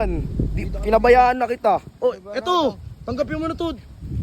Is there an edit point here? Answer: no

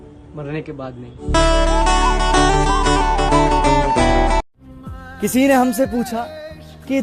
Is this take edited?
yes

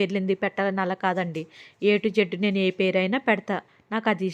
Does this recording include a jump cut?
no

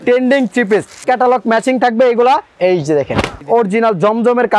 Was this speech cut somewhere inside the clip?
yes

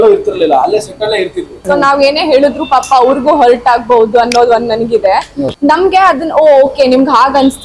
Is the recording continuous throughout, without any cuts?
no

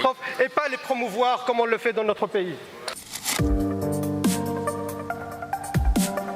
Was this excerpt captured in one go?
no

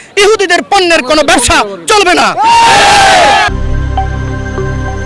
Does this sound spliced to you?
no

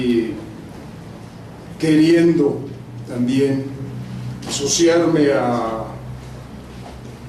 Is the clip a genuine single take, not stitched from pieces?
yes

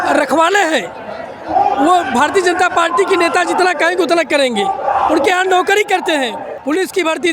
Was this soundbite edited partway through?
yes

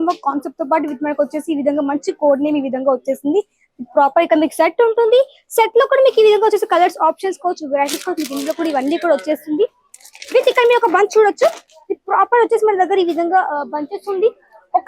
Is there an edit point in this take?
no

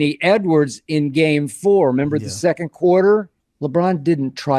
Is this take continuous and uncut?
no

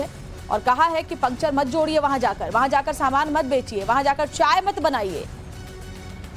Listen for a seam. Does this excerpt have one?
yes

